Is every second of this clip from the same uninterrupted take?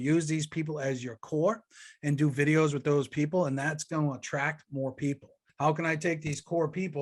no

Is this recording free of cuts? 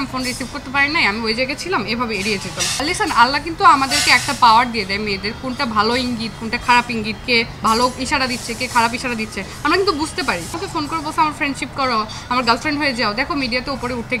no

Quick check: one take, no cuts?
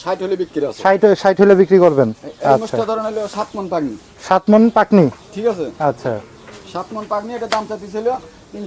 yes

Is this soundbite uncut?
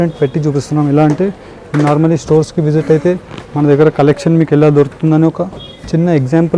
yes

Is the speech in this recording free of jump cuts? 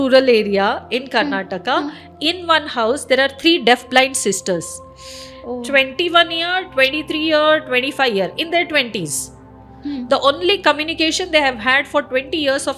yes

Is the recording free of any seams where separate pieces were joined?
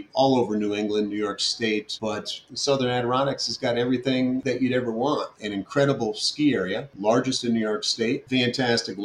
no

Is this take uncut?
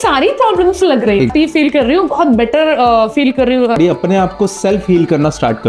no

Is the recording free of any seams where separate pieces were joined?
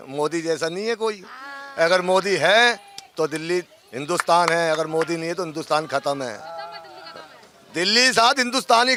yes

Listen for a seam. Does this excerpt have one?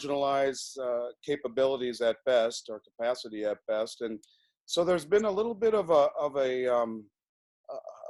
no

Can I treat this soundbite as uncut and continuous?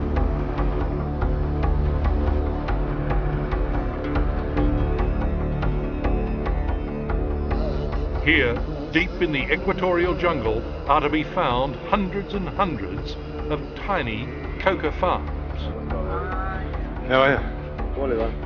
no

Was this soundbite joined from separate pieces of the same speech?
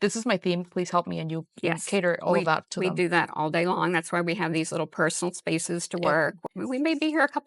yes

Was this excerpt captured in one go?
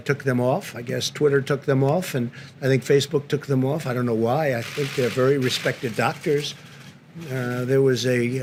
yes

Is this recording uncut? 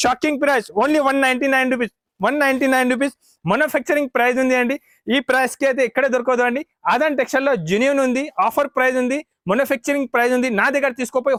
yes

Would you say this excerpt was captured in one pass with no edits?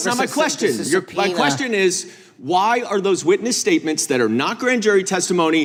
yes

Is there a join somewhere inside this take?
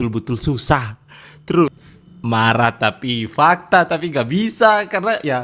yes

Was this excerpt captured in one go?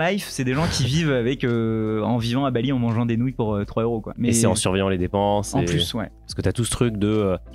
yes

